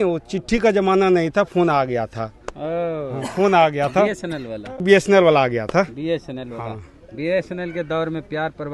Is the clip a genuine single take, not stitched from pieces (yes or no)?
no